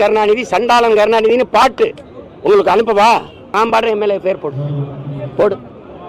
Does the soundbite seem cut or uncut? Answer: cut